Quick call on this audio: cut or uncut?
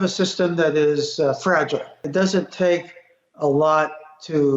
cut